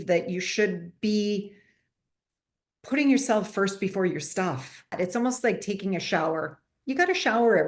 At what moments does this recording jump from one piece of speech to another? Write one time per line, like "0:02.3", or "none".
0:04.9